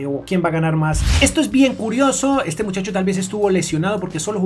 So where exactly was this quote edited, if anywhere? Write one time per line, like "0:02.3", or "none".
0:01.1